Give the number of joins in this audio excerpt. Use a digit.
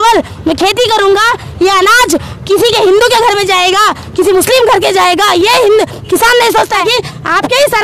1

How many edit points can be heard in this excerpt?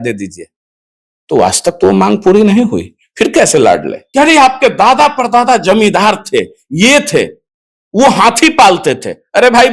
1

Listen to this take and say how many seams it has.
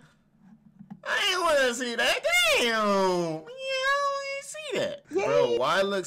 1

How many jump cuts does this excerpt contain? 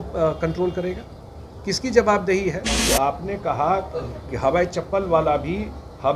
1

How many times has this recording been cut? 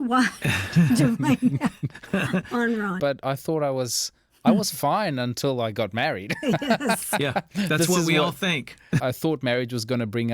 2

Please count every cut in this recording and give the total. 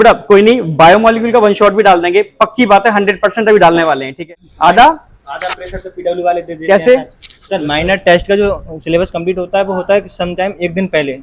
1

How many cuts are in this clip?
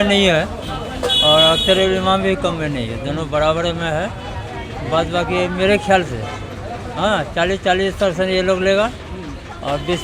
0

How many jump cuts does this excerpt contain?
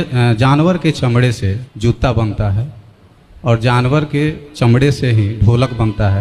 1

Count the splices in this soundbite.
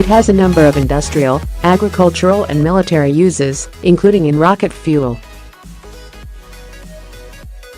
0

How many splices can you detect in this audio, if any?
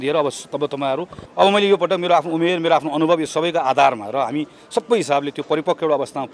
1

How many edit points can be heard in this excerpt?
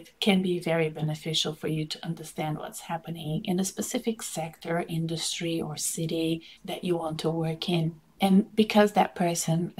1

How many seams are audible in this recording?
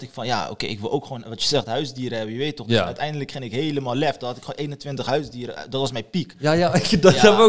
0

